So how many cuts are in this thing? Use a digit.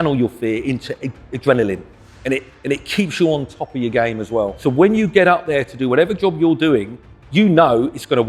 1